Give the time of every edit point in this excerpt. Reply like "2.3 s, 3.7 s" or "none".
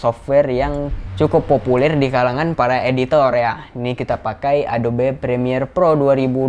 none